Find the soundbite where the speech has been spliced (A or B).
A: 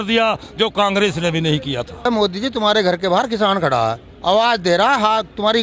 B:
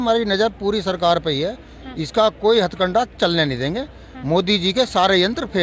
A